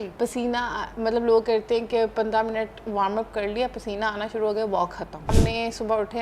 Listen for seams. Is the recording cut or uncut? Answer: cut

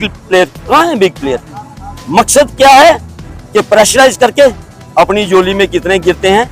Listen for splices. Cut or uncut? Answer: uncut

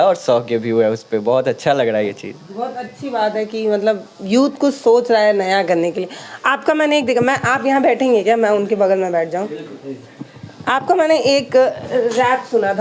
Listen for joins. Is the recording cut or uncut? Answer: uncut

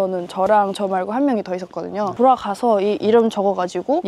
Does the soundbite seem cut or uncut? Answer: uncut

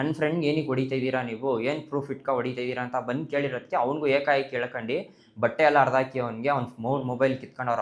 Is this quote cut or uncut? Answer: uncut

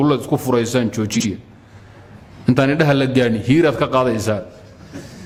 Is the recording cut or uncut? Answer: uncut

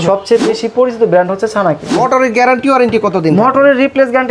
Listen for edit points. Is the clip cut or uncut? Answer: cut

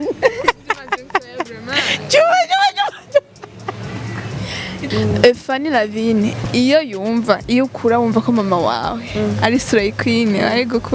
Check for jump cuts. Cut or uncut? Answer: cut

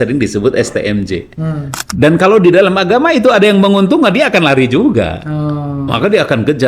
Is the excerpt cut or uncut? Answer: cut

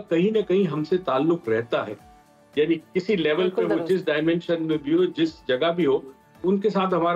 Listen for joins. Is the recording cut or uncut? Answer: uncut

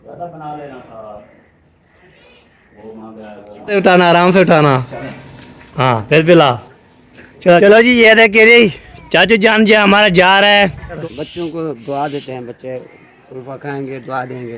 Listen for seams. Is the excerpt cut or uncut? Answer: cut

